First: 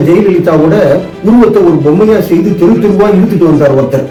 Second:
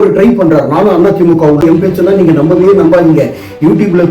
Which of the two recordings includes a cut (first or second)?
second